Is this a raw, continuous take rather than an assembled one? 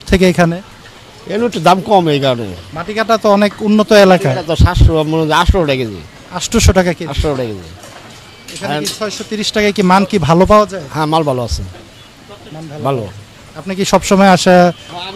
yes; 0 cuts

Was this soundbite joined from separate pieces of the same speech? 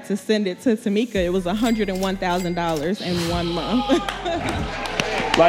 no; 0 cuts

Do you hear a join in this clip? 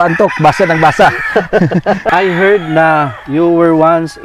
yes; 1 cut; at 2.0 s

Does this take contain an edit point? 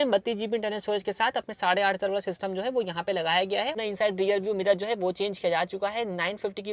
yes; 1 cut; at 3.7 s

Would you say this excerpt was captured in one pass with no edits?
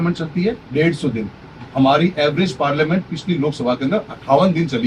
yes; 0 cuts

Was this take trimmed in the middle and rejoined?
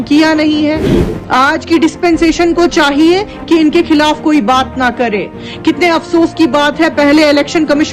yes; 1 cut; at 0.9 s

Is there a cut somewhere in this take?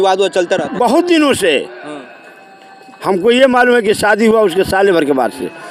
no; 0 cuts

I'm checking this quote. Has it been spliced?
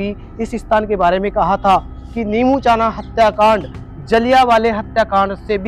no; 0 cuts

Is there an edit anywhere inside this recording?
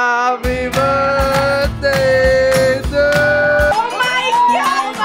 yes; 1 cut; at 3.7 s

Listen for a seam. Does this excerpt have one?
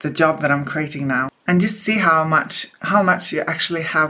no; 0 cuts

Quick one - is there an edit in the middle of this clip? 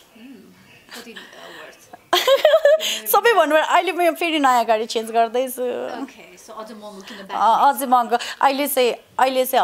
no; 0 cuts

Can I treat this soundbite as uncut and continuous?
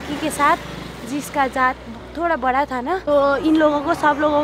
no; 1 cut; at 3.0 s

